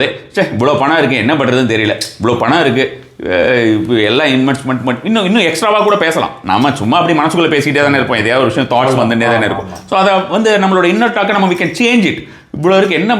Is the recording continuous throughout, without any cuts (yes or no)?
yes